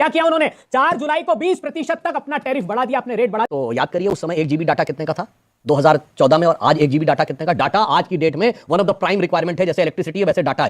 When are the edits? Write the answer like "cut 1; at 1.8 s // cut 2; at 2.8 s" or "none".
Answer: cut 1; at 3.5 s